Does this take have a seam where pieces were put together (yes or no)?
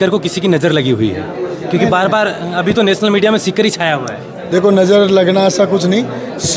no